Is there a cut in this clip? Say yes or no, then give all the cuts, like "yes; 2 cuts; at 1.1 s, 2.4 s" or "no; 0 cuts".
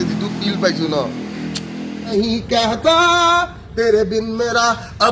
yes; 1 cut; at 2.0 s